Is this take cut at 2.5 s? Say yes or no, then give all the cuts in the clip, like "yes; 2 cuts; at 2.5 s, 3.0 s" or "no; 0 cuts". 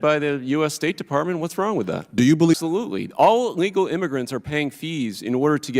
yes; 1 cut; at 2.5 s